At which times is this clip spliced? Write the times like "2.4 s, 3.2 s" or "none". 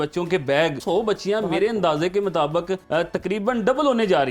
0.8 s, 2.8 s

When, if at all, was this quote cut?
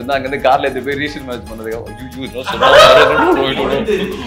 none

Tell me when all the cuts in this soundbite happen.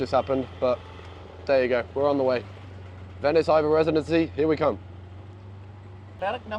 none

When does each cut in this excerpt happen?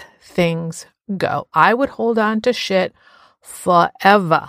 none

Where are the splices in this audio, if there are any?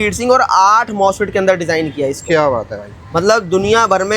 none

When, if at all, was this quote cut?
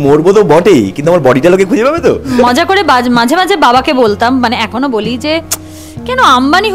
2.4 s

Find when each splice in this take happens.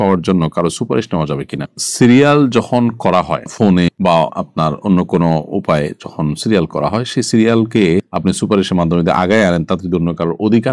none

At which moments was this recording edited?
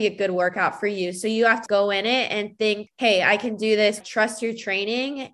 1.6 s, 2.8 s, 4.0 s

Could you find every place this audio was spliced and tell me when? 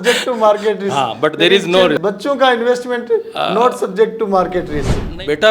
2.0 s

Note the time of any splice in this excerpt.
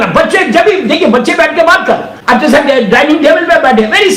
2.1 s

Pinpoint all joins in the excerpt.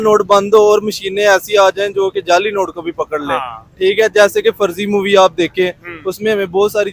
none

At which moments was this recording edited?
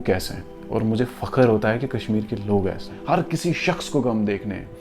2.9 s

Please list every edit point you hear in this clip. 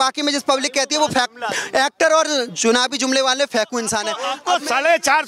4.3 s

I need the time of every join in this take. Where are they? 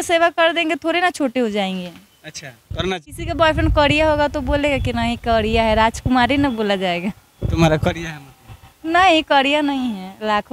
2.9 s

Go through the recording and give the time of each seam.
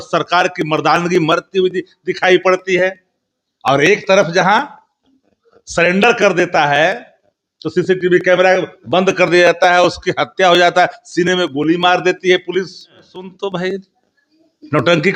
13.2 s

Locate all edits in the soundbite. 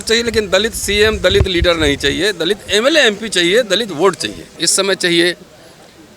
4.5 s

